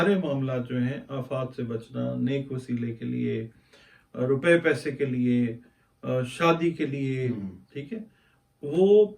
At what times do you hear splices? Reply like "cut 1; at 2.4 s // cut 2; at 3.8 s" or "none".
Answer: none

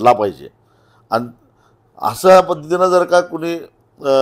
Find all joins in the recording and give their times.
none

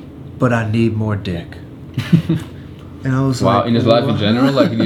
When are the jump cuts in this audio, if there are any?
none

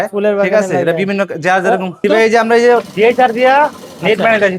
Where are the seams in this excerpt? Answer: cut 1; at 2.0 s

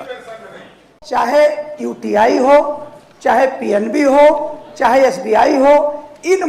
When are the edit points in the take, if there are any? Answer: cut 1; at 1.0 s

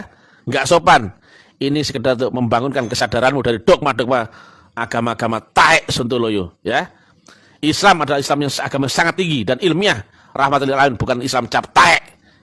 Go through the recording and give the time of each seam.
none

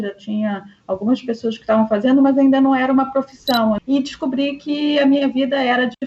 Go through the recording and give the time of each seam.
cut 1; at 3.8 s

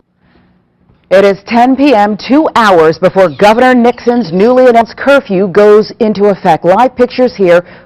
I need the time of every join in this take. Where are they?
cut 1; at 2.4 s

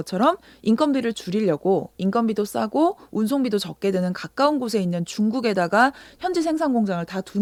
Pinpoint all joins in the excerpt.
none

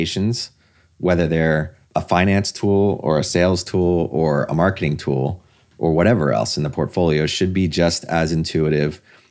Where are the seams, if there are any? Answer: cut 1; at 1.8 s

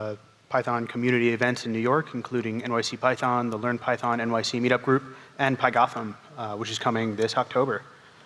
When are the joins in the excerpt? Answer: cut 1; at 4.9 s

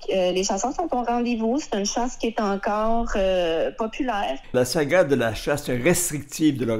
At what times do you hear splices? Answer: cut 1; at 4.5 s

